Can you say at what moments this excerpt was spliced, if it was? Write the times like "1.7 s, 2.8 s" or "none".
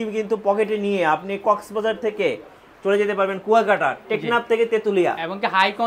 none